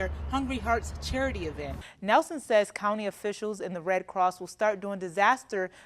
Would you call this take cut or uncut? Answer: cut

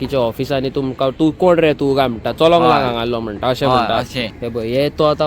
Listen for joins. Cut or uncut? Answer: cut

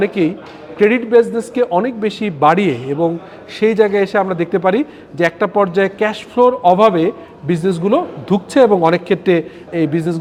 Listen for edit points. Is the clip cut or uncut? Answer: uncut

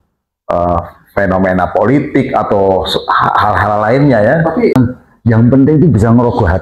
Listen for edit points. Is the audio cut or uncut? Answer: cut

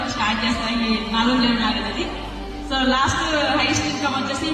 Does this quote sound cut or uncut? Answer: uncut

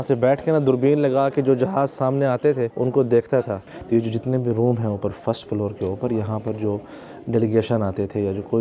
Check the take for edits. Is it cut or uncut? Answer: cut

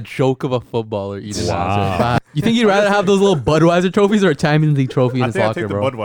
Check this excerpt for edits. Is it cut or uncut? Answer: cut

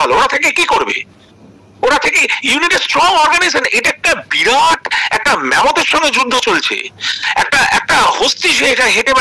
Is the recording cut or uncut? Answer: uncut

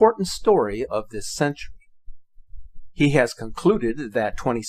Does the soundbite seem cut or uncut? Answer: uncut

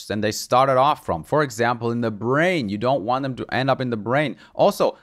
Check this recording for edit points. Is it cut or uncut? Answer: uncut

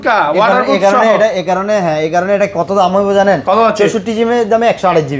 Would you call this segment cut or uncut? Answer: uncut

